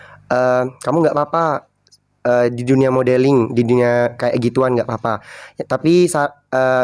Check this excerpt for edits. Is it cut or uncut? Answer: uncut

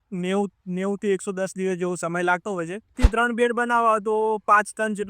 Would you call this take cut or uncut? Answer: cut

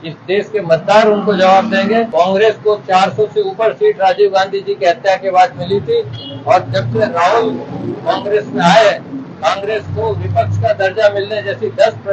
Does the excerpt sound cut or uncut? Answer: cut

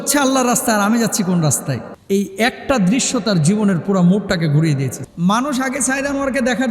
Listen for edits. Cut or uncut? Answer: cut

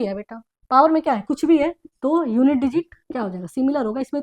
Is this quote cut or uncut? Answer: uncut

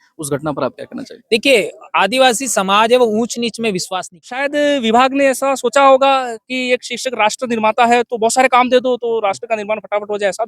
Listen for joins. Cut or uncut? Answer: cut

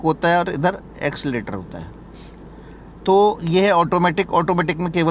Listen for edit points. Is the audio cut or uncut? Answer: uncut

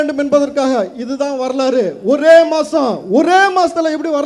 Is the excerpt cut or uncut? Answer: uncut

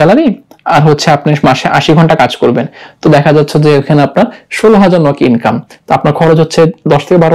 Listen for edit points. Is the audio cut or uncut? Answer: uncut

